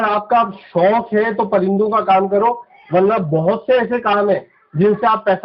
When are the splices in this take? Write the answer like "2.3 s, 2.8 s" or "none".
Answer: none